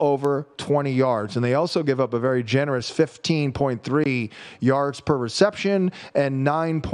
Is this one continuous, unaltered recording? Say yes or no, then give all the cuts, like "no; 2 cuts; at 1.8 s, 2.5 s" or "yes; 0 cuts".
yes; 0 cuts